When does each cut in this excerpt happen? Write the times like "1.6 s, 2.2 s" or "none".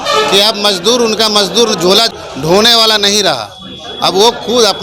2.1 s